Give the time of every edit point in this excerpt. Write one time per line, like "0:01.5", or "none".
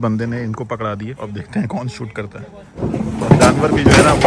0:01.1
0:02.8